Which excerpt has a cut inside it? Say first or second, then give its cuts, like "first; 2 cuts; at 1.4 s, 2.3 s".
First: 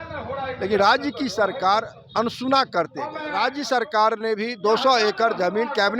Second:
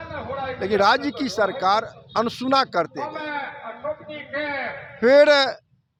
first; 1 cut; at 3.2 s